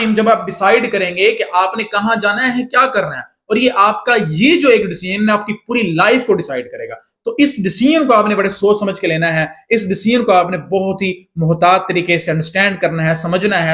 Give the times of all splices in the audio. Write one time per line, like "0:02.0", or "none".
none